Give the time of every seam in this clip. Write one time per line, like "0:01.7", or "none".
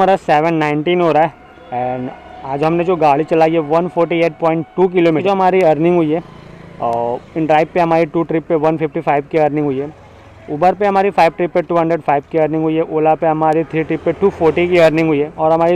none